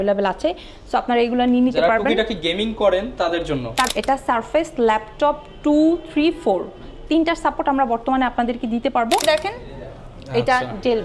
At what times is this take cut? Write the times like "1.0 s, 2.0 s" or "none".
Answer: 3.9 s, 9.2 s